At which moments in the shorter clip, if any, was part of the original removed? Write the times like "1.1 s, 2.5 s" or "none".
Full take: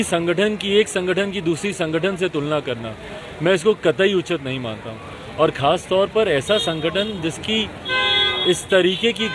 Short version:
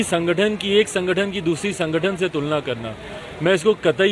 none